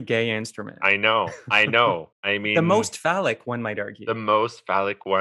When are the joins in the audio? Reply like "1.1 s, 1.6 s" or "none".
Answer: 1.0 s, 2.5 s, 3.9 s